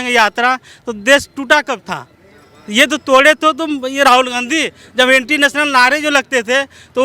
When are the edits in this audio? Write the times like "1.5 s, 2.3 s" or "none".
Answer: none

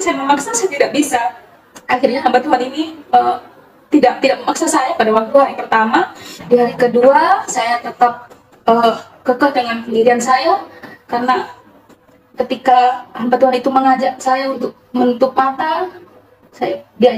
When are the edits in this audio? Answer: none

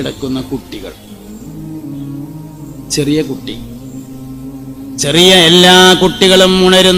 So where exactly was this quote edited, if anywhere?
none

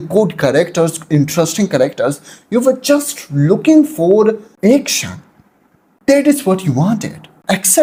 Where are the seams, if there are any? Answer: none

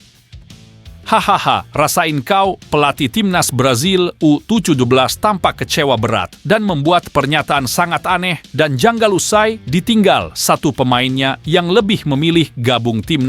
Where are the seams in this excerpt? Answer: 1.0 s

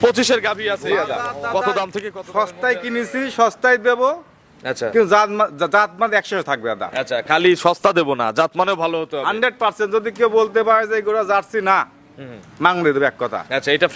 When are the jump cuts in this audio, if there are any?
2.2 s

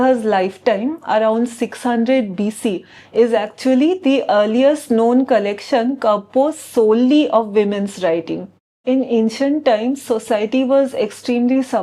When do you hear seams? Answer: 8.8 s

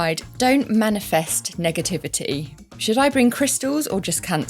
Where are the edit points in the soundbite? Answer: none

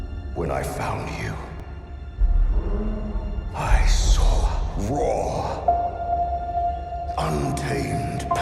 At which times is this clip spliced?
3.9 s

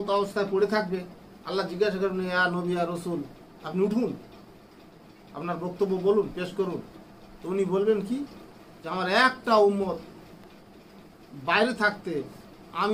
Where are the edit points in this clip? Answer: none

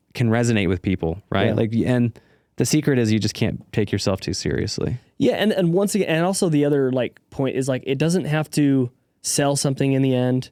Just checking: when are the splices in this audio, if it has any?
none

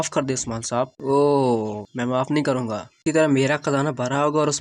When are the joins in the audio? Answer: 1.0 s, 3.0 s

